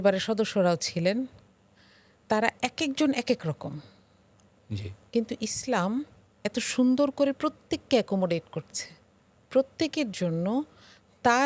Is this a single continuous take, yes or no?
yes